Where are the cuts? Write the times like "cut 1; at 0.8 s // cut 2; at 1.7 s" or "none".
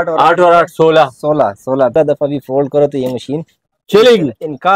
cut 1; at 1.9 s